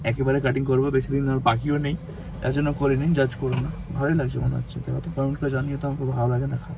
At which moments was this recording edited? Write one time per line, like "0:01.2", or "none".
none